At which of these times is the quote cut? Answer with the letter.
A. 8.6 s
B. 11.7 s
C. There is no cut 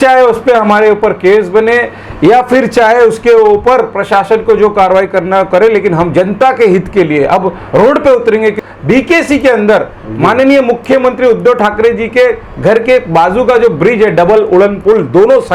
A